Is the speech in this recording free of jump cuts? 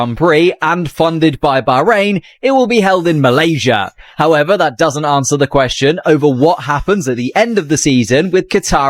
yes; 0 cuts

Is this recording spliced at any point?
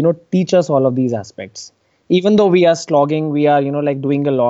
no; 0 cuts

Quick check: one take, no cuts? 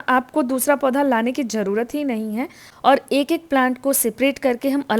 no; 1 cut; at 2.6 s

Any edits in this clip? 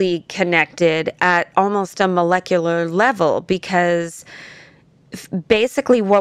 no; 0 cuts

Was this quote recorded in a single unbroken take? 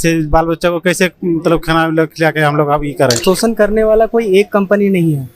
no; 1 cut; at 3.2 s

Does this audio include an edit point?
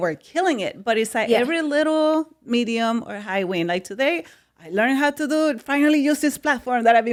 no; 0 cuts

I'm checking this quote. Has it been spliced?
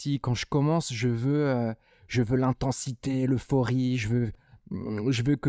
yes; 1 cut; at 4.5 s

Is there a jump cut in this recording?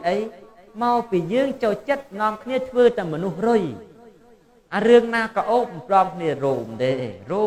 no; 0 cuts

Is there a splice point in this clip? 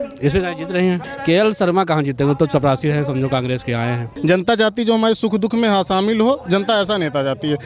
yes; 2 cuts; at 1.1 s, 4.1 s

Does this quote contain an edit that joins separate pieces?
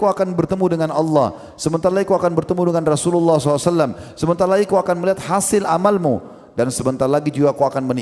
no; 0 cuts

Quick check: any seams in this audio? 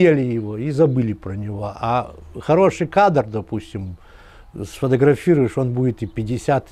no; 0 cuts

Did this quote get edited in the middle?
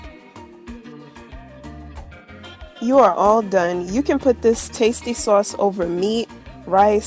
yes; 1 cut; at 2.5 s

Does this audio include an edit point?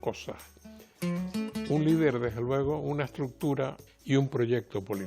yes; 1 cut; at 3.9 s

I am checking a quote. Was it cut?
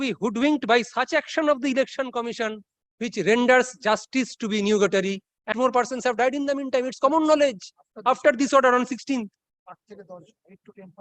yes; 1 cut; at 5.5 s

